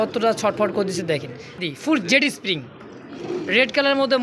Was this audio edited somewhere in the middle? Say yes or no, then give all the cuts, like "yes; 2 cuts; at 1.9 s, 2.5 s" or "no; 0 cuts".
yes; 1 cut; at 1.6 s